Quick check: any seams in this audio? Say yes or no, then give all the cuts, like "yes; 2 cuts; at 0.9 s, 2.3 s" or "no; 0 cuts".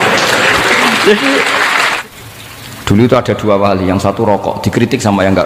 yes; 1 cut; at 1.9 s